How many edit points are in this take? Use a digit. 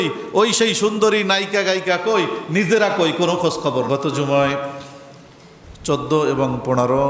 1